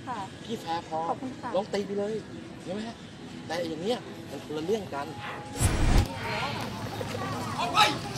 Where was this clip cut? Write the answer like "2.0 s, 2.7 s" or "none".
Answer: 5.8 s